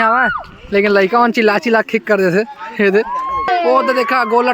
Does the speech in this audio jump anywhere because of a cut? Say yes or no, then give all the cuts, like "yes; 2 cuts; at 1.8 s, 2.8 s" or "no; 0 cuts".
yes; 1 cut; at 3.5 s